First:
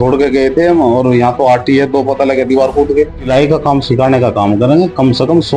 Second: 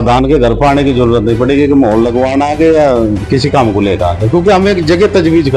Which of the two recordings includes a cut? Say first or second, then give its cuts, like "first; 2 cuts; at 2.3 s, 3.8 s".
first; 1 cut; at 3.3 s